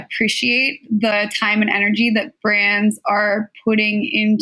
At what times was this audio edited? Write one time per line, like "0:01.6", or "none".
0:01.1